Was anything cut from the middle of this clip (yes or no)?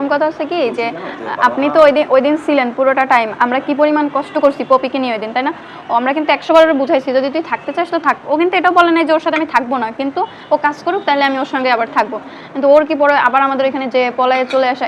no